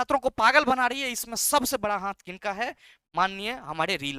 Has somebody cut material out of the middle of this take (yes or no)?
no